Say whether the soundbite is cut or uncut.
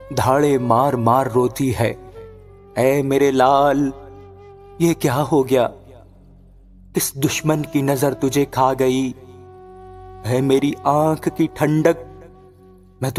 uncut